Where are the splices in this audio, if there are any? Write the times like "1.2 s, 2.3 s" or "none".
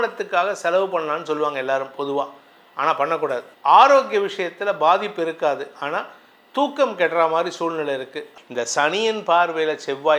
3.5 s, 8.2 s